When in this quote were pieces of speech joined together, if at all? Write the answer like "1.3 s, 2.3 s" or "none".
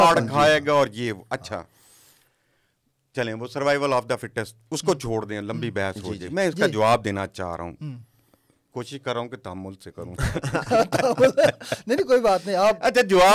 none